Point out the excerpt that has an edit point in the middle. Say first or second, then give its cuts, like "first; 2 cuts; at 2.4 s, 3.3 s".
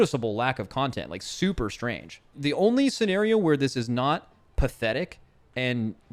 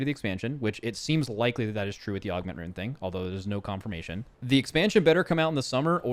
second; 1 cut; at 4.3 s